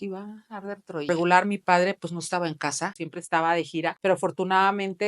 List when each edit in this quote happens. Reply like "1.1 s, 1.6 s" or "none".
1.1 s, 3.0 s, 4.0 s